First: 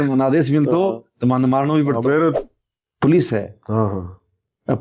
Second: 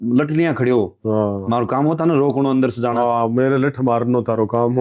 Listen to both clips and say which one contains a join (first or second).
first